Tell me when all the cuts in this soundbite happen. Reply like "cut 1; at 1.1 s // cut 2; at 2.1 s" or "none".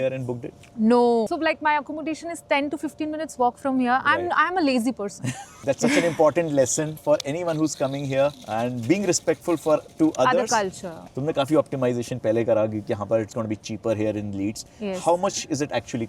cut 1; at 1.3 s // cut 2; at 5.5 s // cut 3; at 11.0 s